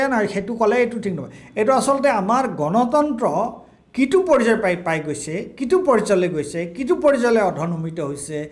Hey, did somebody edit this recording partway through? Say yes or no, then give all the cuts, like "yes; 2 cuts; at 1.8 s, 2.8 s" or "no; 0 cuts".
no; 0 cuts